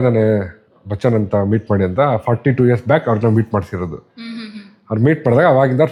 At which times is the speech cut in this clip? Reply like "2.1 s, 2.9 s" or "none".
none